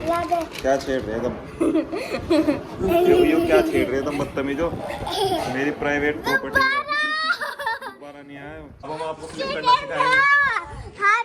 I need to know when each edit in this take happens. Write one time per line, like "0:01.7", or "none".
0:08.9